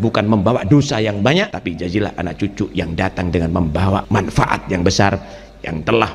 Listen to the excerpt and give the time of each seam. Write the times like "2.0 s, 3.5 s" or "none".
1.5 s, 4.0 s